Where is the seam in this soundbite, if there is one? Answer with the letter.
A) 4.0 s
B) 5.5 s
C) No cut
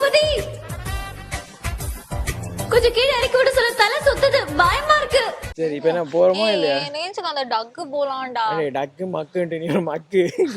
B